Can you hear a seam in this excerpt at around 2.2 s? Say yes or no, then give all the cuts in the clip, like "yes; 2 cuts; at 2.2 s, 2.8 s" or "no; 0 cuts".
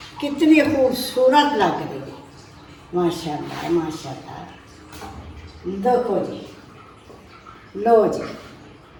no; 0 cuts